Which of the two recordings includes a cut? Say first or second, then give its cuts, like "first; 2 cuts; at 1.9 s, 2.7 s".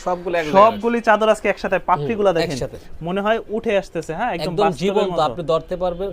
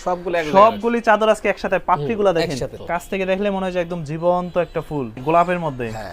second; 2 cuts; at 2.8 s, 5.2 s